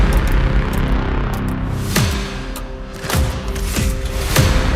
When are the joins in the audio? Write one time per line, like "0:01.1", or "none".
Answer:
none

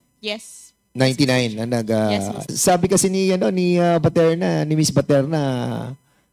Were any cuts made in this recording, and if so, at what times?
0:02.4

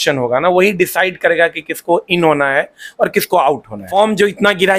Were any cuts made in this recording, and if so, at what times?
0:03.9

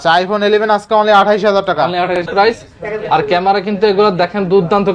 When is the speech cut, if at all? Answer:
0:02.2

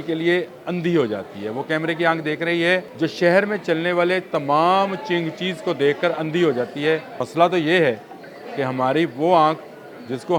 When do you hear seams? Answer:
0:02.9
0:07.2

